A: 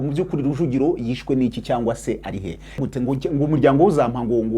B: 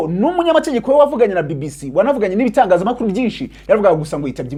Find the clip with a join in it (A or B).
A